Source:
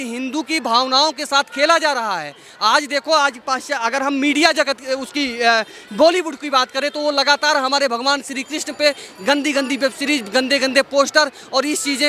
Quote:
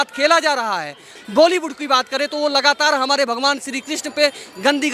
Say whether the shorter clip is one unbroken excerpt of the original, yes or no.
no